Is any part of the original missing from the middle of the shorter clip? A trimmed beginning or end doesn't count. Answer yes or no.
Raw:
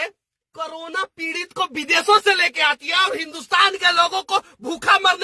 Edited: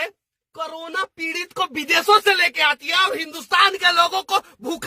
no